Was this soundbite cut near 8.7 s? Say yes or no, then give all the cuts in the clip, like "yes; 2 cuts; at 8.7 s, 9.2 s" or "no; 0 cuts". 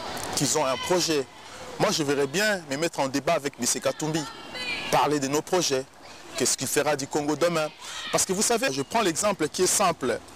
yes; 1 cut; at 8.7 s